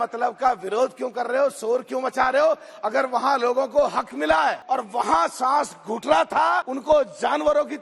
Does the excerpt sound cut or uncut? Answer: cut